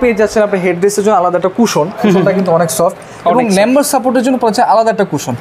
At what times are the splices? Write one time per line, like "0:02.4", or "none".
none